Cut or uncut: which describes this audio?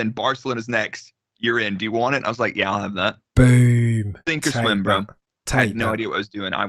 uncut